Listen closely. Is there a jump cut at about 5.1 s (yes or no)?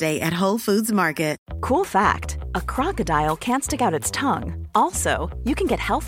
no